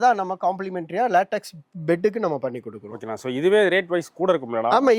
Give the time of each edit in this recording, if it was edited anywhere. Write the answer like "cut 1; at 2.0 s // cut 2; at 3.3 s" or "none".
none